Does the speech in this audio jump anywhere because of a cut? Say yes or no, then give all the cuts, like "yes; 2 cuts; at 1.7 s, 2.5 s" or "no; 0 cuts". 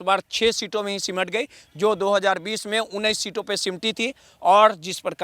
no; 0 cuts